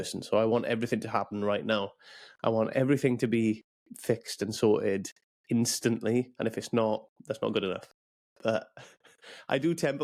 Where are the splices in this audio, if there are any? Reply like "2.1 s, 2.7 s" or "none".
none